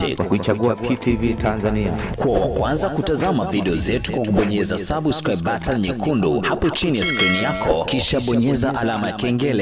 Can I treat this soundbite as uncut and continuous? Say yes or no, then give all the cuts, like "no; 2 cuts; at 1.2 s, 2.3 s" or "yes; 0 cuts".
yes; 0 cuts